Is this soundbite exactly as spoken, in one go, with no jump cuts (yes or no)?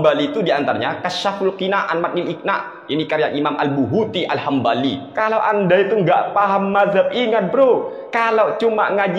no